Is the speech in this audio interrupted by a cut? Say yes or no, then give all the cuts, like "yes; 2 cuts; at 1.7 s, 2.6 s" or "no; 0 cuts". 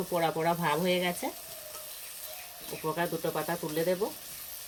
no; 0 cuts